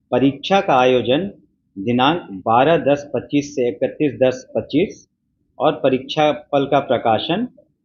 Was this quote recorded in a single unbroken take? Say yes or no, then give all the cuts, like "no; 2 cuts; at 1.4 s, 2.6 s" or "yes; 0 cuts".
yes; 0 cuts